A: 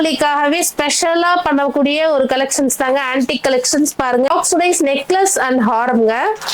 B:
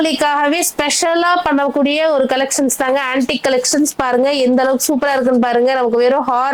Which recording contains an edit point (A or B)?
A